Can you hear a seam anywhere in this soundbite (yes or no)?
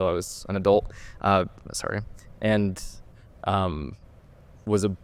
no